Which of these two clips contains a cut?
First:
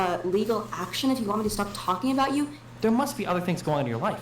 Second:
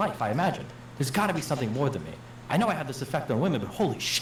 first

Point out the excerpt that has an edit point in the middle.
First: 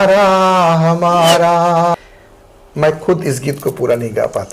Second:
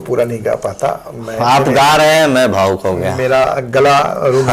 first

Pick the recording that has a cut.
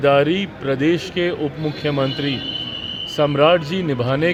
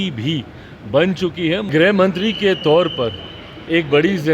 second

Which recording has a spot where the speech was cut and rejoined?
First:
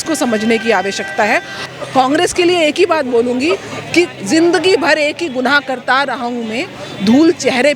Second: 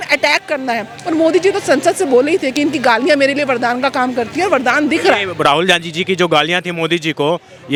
first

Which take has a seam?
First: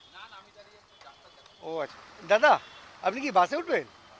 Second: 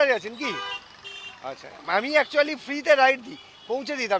first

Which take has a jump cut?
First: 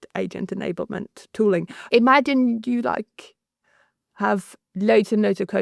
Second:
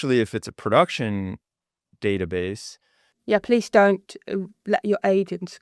first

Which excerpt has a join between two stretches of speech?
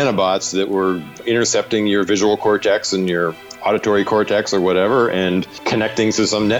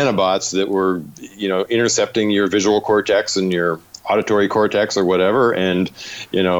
first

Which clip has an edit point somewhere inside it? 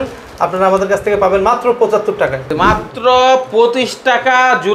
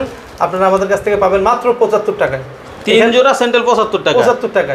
first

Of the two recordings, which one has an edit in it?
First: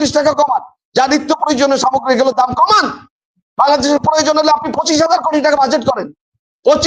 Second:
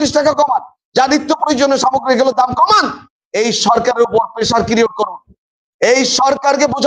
second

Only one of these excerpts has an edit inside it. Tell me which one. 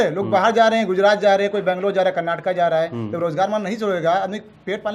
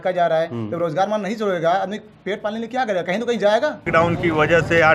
second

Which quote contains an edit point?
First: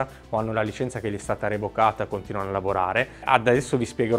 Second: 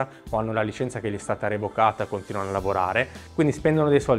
second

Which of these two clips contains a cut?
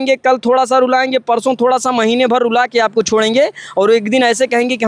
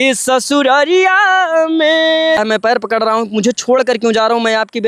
second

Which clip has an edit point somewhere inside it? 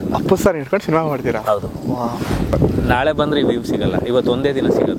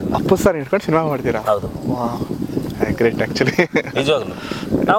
first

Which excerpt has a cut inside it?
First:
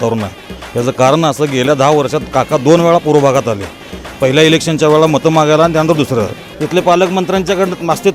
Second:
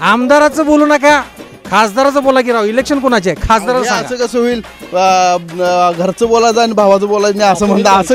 first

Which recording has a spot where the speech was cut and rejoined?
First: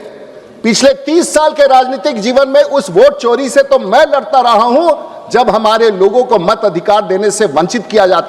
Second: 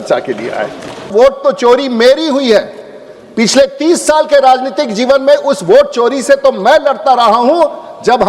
second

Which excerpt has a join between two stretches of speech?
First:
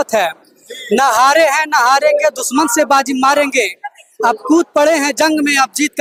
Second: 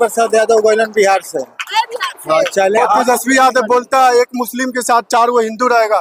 second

